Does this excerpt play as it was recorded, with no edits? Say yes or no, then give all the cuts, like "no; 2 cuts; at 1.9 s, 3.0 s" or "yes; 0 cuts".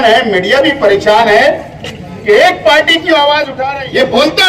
no; 1 cut; at 3.5 s